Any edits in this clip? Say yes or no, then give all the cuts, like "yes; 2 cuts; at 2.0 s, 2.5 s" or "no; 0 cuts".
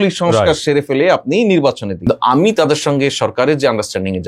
yes; 1 cut; at 2.1 s